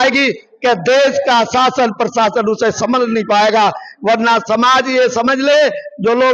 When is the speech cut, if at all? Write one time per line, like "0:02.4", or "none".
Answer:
none